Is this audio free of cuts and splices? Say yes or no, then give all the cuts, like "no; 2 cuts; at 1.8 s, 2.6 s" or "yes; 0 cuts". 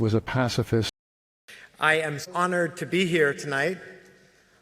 no; 1 cut; at 0.9 s